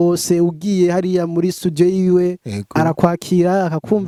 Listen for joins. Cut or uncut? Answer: uncut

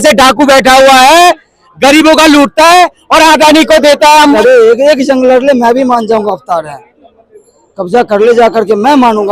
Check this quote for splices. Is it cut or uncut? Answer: cut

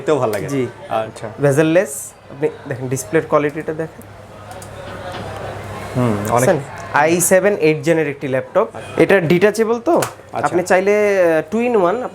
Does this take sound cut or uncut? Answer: cut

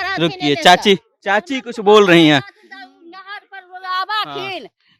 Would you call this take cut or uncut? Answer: uncut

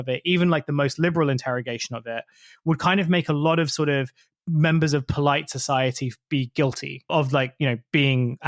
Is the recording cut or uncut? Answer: uncut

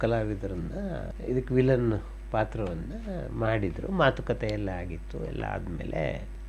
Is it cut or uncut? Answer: uncut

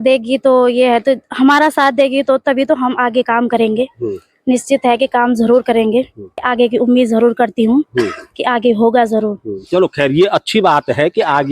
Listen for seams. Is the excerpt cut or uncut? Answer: cut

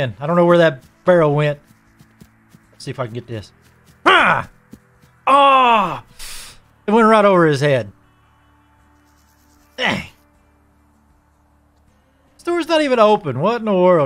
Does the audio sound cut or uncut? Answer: uncut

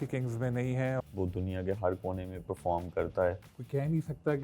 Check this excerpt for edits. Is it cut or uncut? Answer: cut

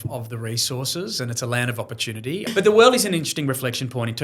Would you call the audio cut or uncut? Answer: cut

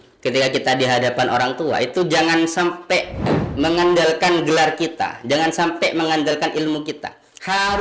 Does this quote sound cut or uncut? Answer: cut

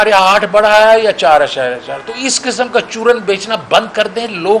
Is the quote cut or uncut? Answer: uncut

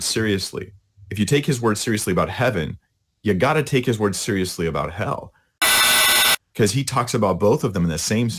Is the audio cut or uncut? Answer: uncut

